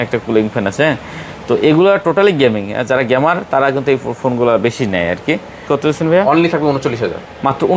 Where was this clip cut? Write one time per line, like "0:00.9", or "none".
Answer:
0:05.6